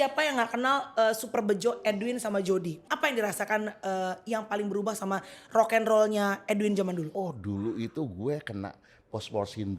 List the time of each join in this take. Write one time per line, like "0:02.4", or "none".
0:02.8
0:07.1